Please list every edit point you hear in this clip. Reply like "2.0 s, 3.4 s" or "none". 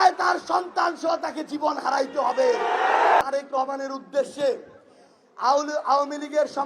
3.2 s